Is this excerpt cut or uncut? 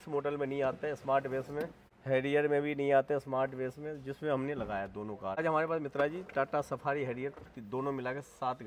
cut